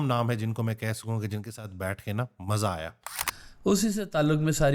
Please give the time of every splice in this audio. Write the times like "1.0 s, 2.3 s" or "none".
3.5 s